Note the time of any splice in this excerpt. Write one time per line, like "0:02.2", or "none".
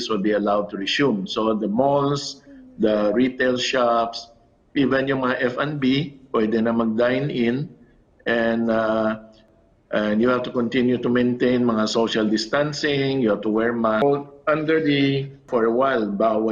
0:09.4
0:14.0
0:15.5